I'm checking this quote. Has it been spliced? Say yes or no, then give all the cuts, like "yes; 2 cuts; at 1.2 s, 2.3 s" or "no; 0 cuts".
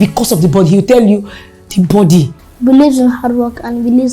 yes; 1 cut; at 2.4 s